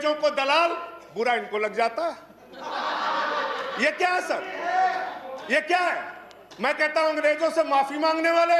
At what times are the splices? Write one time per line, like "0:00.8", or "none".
none